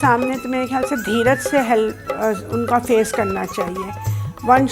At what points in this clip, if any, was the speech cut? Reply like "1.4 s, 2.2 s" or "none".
none